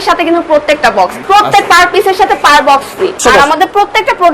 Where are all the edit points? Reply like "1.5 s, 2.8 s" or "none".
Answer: 1.1 s, 3.2 s